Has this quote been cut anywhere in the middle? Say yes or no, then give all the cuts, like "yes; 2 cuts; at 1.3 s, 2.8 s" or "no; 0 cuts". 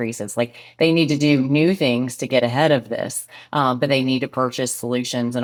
no; 0 cuts